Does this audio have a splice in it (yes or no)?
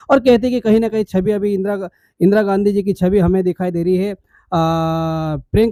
no